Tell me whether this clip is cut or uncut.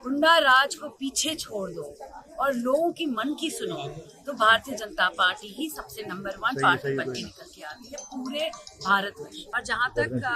cut